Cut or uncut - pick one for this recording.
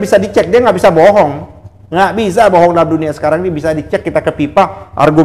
uncut